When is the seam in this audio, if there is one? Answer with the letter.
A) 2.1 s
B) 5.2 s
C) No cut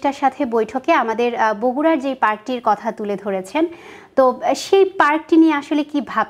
C